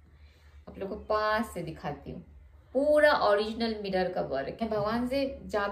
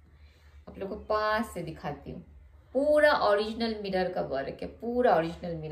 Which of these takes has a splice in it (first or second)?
first